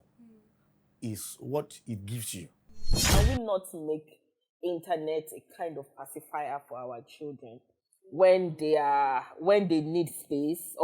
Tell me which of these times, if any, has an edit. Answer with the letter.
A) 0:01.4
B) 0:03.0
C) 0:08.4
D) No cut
B